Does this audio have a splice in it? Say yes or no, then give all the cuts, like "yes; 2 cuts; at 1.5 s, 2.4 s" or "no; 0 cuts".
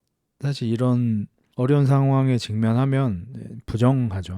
yes; 1 cut; at 1.4 s